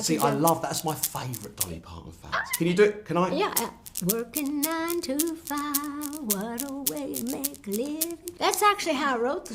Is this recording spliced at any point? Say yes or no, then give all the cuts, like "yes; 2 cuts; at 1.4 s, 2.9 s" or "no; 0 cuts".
yes; 1 cut; at 8.2 s